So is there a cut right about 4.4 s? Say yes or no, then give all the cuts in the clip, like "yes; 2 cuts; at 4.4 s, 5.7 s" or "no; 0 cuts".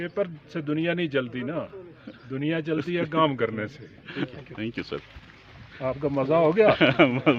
yes; 1 cut; at 4.4 s